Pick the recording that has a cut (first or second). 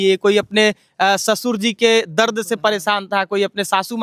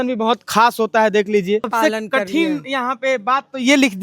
second